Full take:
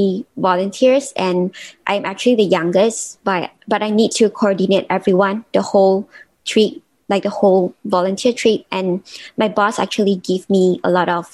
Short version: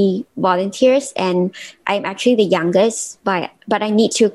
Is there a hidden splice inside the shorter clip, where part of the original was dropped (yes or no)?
no